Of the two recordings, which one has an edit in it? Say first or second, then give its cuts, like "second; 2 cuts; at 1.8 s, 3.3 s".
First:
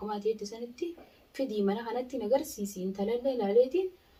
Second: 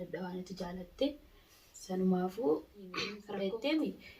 second; 1 cut; at 3.1 s